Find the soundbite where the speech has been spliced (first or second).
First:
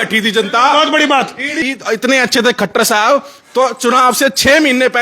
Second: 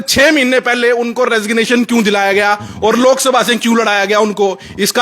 first